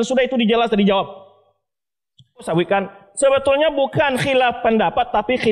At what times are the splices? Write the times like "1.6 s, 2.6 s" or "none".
2.5 s